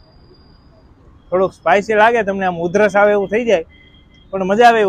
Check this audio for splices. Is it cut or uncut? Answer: uncut